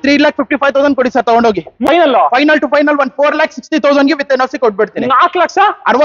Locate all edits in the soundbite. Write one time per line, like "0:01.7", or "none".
0:01.8